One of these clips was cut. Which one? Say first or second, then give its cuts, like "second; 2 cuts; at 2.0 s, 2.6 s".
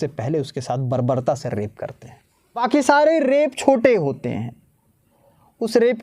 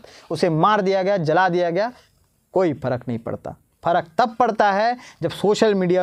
first; 1 cut; at 2.6 s